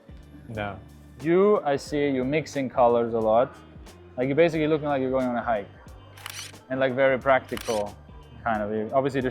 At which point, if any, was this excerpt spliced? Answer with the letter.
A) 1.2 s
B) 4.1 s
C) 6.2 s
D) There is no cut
A